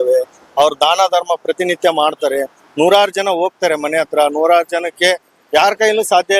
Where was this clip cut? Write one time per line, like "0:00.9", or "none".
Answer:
none